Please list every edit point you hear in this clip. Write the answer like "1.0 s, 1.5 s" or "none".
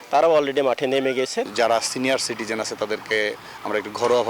1.5 s

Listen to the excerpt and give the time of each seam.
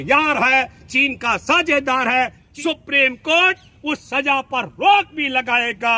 2.4 s

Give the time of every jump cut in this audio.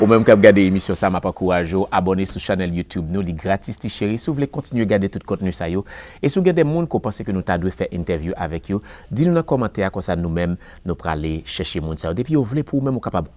none

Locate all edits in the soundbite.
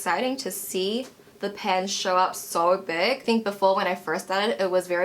3.2 s

